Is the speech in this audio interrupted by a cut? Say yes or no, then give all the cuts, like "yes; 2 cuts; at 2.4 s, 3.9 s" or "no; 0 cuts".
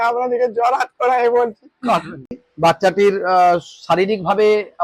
yes; 1 cut; at 2.2 s